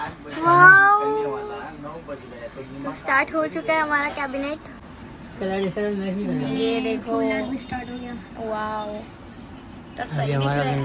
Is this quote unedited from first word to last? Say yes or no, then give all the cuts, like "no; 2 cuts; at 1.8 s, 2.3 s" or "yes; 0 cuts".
yes; 0 cuts